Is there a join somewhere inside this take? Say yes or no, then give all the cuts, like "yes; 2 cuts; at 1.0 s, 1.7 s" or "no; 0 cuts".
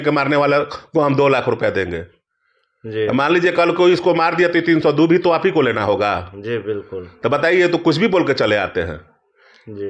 no; 0 cuts